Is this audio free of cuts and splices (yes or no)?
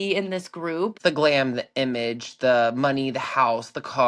no